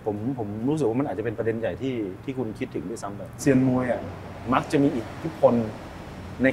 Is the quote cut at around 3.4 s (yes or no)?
yes